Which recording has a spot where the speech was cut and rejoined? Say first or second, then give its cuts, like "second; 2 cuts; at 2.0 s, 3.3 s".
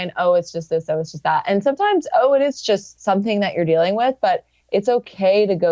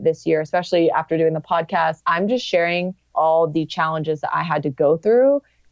second; 2 cuts; at 2.0 s, 3.1 s